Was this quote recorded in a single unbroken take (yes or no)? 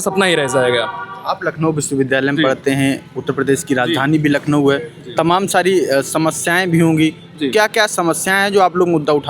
yes